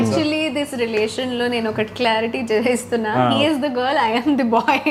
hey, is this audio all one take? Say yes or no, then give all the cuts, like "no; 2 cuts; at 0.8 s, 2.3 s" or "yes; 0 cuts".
yes; 0 cuts